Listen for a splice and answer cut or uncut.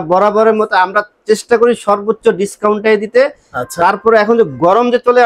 uncut